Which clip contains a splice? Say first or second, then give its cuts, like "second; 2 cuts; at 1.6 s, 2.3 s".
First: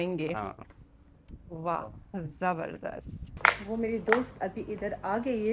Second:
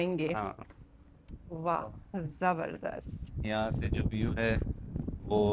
first; 1 cut; at 3.3 s